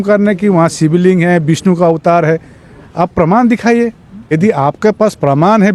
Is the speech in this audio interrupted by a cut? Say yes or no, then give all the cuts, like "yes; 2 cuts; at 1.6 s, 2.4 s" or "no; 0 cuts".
yes; 1 cut; at 4.3 s